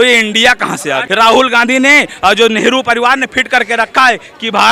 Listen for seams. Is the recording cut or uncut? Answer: cut